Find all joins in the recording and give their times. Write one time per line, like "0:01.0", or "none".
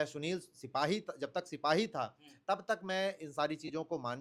none